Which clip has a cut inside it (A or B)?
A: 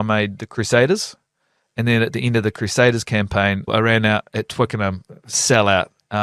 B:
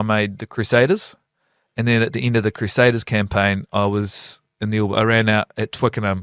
A